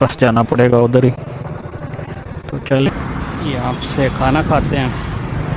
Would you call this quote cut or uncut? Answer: cut